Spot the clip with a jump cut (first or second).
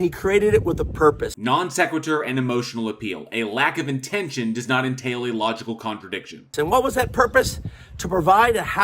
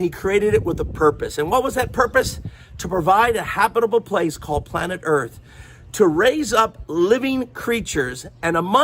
second